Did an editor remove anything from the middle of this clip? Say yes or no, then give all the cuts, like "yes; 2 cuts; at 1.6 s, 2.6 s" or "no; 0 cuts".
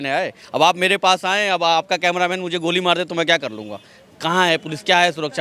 no; 0 cuts